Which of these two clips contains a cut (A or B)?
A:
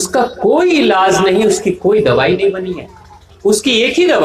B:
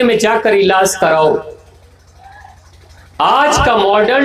A